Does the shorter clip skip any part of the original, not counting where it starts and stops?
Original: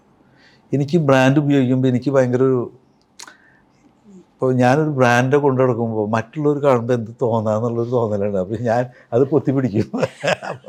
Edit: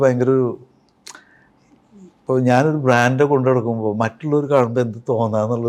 no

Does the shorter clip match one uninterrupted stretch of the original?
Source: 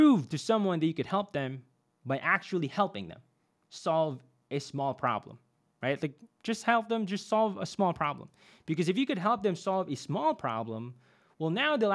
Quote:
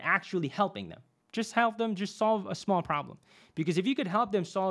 no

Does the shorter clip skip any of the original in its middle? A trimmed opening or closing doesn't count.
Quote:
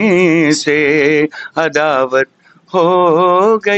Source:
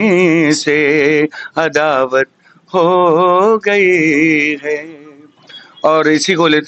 no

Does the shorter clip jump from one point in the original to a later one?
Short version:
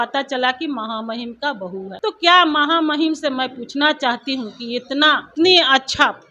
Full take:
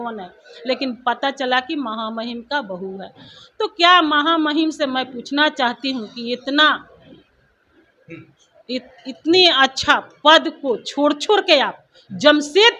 yes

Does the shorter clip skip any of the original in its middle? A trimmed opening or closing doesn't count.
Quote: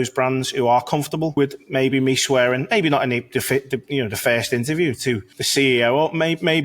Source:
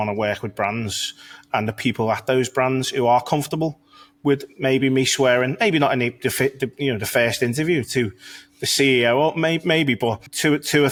yes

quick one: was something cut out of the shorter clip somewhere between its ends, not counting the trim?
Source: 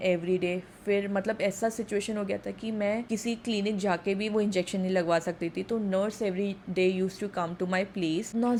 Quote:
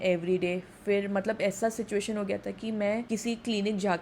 no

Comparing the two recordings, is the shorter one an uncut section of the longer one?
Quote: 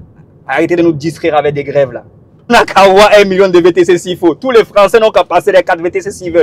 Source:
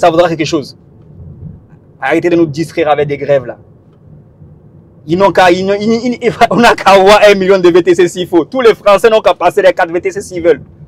no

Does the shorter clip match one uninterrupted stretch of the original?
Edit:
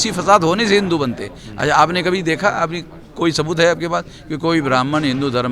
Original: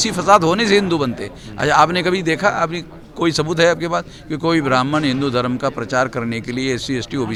yes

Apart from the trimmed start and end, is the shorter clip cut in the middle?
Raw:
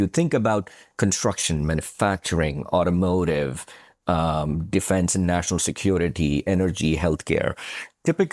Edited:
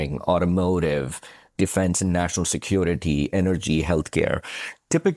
yes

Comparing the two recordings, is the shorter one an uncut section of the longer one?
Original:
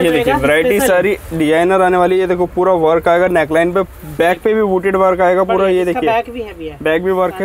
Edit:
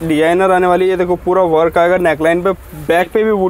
yes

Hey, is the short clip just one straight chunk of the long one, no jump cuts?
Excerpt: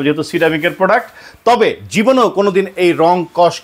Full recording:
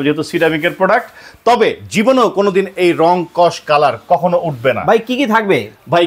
yes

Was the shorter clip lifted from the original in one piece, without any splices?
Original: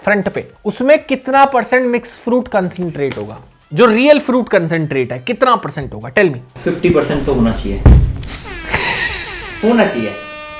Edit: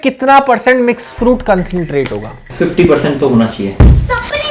no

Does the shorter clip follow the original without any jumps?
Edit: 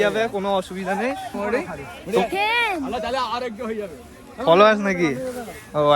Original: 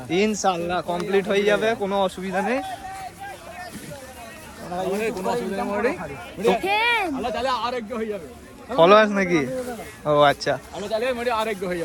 no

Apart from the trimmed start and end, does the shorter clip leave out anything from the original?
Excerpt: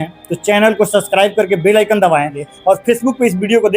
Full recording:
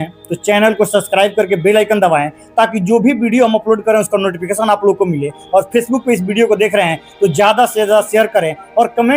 yes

